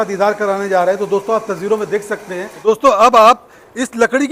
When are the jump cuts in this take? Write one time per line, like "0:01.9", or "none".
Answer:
0:02.5